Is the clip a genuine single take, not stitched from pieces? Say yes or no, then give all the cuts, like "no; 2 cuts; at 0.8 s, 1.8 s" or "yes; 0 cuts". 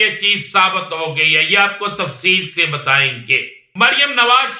no; 1 cut; at 3.6 s